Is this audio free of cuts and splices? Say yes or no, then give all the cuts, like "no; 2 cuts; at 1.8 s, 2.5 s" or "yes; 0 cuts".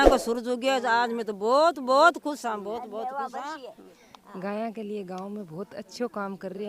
no; 1 cut; at 3.9 s